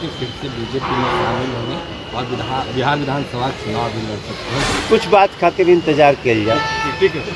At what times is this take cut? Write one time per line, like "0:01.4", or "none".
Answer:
0:04.8